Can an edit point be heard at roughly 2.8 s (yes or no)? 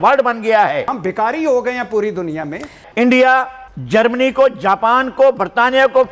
yes